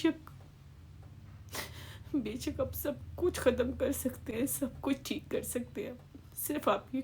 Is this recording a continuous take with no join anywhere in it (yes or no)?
yes